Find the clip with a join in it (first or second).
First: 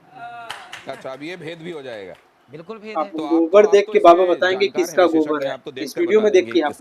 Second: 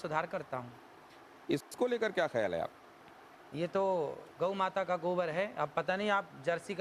first